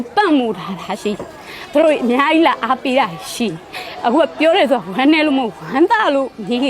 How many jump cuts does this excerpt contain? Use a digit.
0